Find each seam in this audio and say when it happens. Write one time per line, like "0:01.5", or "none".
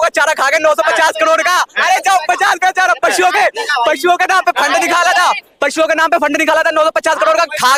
none